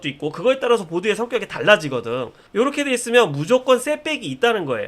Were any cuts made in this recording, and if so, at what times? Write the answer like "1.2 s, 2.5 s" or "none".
2.4 s